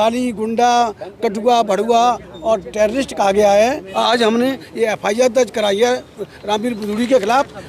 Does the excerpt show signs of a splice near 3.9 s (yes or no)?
yes